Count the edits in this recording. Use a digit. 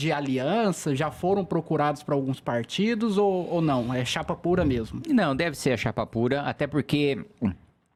0